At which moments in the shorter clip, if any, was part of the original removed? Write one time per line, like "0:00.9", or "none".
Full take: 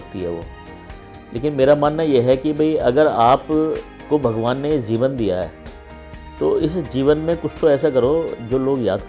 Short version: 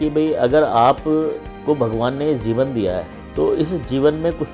0:03.2